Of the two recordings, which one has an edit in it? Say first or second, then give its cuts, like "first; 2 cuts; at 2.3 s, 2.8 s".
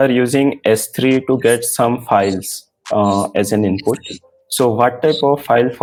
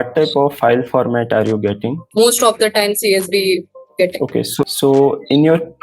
second; 3 cuts; at 2.0 s, 3.8 s, 4.6 s